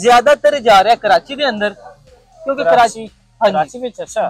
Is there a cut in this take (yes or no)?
no